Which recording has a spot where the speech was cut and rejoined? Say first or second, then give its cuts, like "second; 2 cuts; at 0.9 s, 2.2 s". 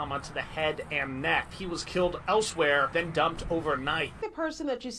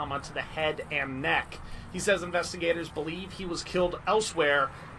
first; 3 cuts; at 1.5 s, 2.9 s, 4.2 s